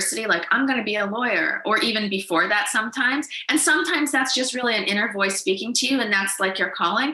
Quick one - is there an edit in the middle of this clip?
no; 0 cuts

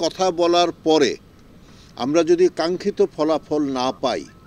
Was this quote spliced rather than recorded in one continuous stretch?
no; 0 cuts

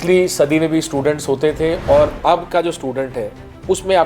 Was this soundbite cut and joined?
yes; 1 cut; at 2.2 s

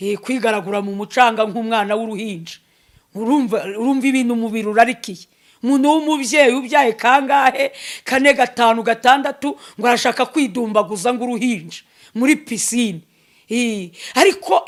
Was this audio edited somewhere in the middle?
no; 0 cuts

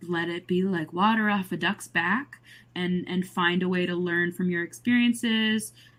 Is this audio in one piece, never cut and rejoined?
yes; 0 cuts

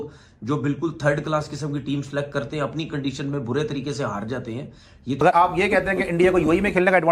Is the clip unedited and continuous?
no; 1 cut; at 5.3 s

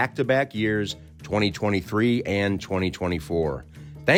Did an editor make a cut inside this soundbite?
no; 0 cuts

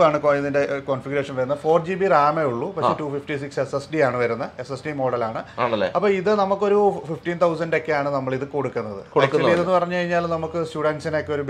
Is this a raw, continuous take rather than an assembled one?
yes; 0 cuts

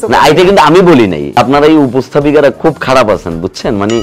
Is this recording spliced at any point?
yes; 1 cut; at 1.4 s

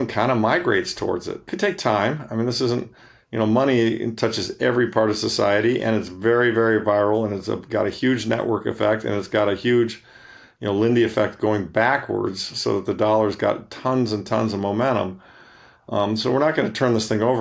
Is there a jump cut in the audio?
yes; 1 cut; at 1.5 s

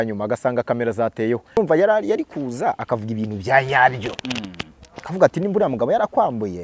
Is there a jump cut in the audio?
yes; 1 cut; at 1.6 s

